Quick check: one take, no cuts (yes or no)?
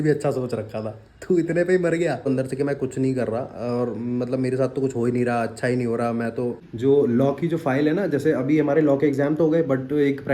no